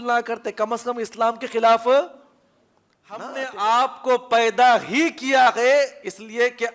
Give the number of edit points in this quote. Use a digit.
1